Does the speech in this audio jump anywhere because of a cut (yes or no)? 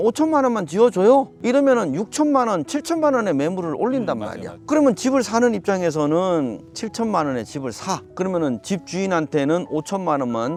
no